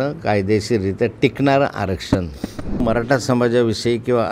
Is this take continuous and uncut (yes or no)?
no